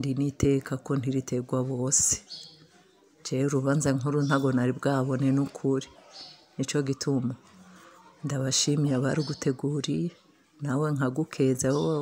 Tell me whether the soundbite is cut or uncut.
uncut